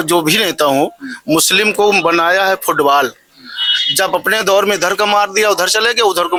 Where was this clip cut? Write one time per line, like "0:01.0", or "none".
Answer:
none

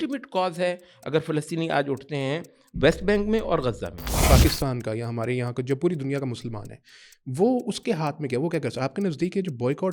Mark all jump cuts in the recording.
0:04.2

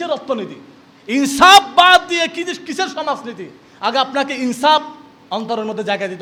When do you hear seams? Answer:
none

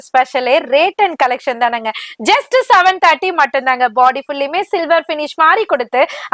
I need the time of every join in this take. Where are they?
none

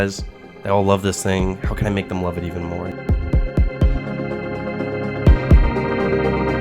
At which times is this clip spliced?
0:02.8

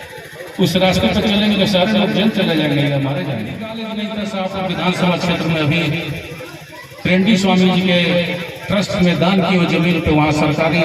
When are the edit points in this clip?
0:03.6

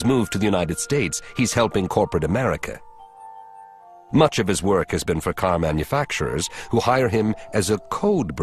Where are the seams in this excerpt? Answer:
0:01.4

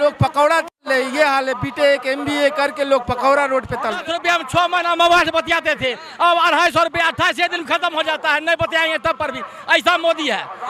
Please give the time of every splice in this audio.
0:04.0

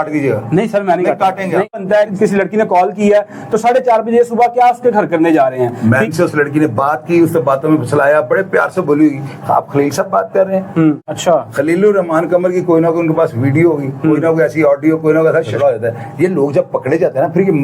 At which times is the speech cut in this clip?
0:01.8
0:06.1
0:11.0
0:15.5

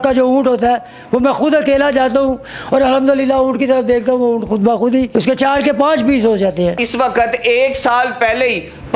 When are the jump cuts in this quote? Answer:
0:05.1
0:06.8

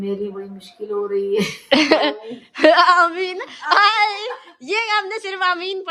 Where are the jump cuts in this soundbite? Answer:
none

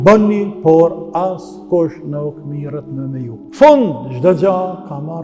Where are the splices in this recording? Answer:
0:03.4

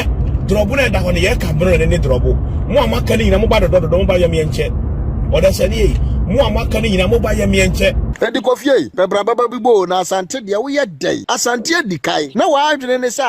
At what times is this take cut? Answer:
0:08.1
0:08.9
0:11.2
0:12.3

